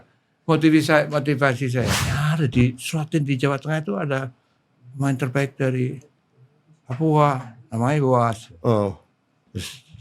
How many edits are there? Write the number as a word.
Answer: one